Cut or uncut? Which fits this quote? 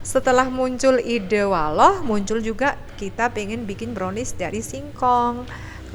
uncut